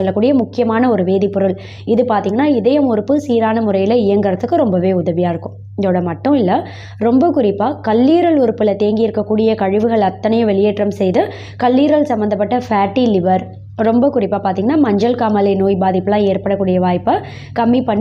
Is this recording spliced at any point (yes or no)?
no